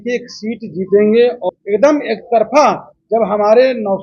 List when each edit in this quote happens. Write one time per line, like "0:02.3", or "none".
0:01.4